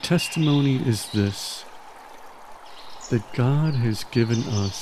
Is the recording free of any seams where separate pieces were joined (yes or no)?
yes